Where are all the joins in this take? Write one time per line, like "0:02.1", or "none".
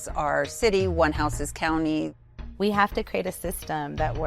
0:02.2